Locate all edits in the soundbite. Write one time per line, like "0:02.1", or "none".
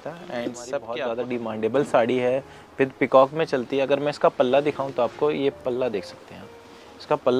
0:01.0